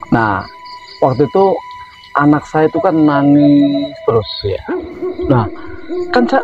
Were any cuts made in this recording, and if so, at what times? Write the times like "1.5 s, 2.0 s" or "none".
none